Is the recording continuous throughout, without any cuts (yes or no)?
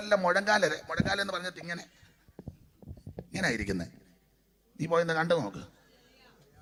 yes